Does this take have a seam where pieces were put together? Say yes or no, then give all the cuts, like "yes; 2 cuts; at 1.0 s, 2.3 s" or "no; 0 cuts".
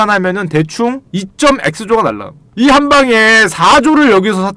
yes; 1 cut; at 1.1 s